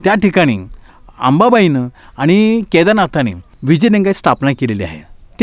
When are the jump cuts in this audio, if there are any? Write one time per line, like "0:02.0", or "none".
0:03.5